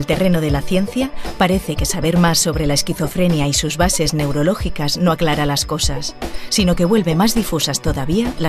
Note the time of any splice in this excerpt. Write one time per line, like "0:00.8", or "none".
0:05.9